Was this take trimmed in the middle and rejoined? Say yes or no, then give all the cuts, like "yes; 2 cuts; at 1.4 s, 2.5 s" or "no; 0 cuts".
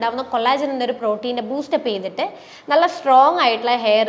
no; 0 cuts